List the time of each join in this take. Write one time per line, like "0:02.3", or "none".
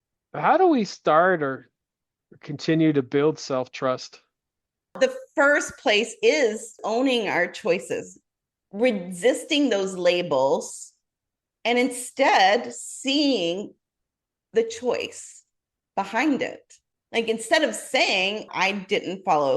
0:04.9
0:06.8
0:18.5